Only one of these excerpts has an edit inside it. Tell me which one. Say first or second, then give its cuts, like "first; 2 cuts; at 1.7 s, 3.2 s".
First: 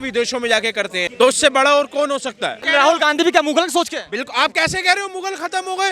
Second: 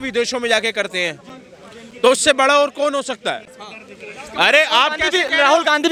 first; 2 cuts; at 1.1 s, 2.6 s